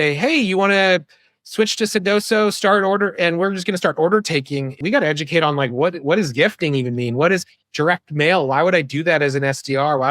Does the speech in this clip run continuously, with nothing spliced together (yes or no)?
no